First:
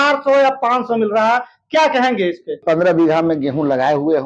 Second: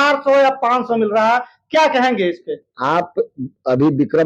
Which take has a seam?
first; 1 cut; at 2.6 s

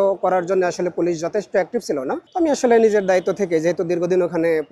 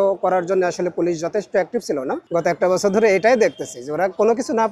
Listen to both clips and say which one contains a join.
second; 1 cut; at 2.2 s

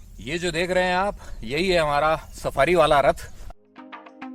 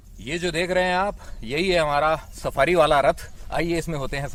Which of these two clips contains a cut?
first; 1 cut; at 3.3 s

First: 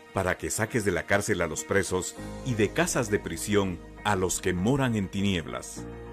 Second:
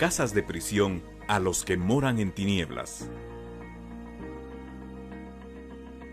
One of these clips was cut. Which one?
second; 1 cut; at 5.1 s

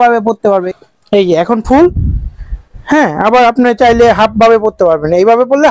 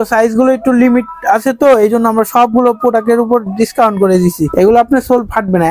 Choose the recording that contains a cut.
second; 1 cut; at 4.4 s

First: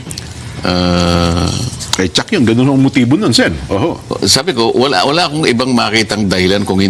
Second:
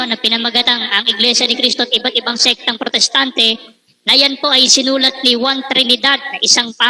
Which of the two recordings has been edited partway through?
first; 1 cut; at 1.3 s

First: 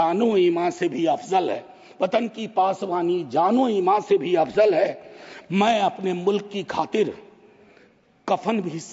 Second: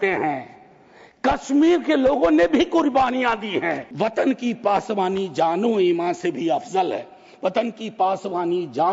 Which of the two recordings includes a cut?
second; 1 cut; at 3.9 s

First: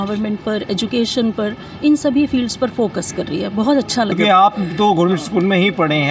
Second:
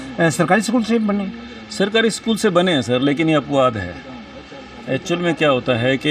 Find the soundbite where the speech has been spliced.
first; 1 cut; at 4.1 s

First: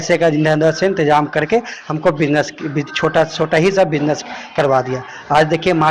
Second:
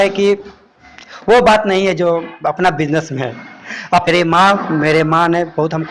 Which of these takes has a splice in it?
second; 1 cut; at 4.1 s

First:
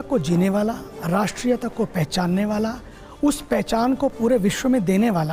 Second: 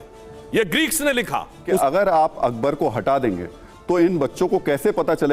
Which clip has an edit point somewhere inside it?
second; 1 cut; at 1.8 s

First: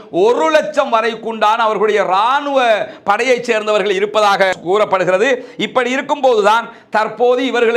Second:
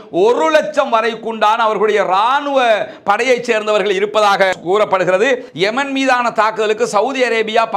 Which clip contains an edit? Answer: second; 1 cut; at 5.5 s

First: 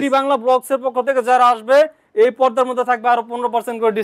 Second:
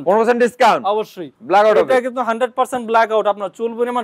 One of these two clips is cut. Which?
second; 1 cut; at 1.3 s

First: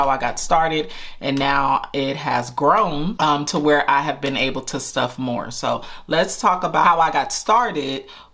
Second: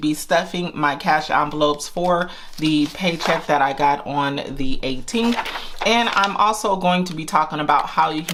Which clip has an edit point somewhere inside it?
first; 2 cuts; at 3.1 s, 6.8 s

